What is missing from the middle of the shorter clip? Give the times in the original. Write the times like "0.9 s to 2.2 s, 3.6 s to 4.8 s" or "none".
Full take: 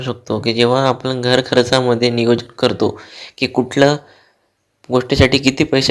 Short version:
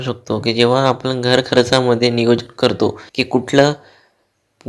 3.1 s to 3.3 s